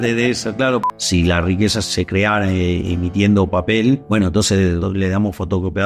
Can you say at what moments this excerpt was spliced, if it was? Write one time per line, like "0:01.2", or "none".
0:00.8
0:01.8
0:04.5